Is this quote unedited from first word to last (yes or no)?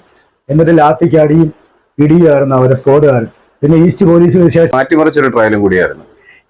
no